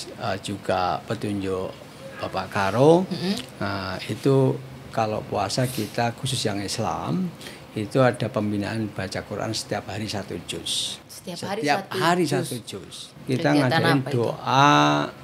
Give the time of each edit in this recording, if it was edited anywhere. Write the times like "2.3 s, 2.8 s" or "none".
13.1 s